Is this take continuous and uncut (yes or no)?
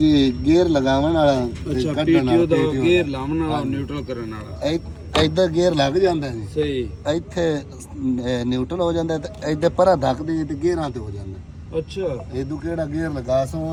yes